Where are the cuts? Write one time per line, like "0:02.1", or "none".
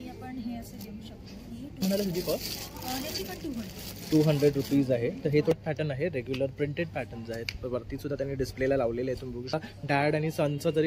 0:01.8
0:05.5
0:09.5